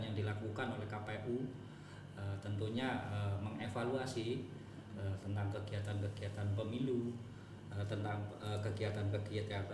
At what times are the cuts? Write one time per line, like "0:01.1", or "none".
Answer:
none